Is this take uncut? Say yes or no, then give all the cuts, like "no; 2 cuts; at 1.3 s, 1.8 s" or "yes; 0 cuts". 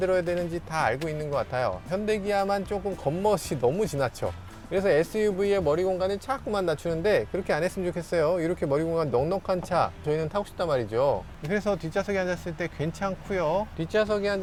yes; 0 cuts